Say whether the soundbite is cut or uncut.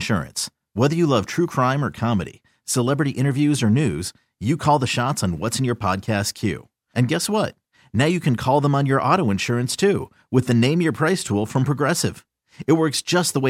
uncut